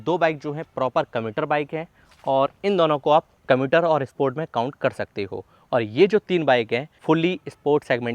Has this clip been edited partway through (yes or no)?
yes